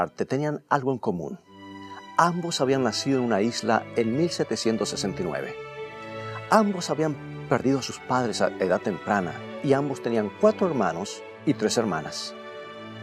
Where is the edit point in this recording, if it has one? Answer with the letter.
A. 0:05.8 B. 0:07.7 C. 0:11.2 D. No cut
C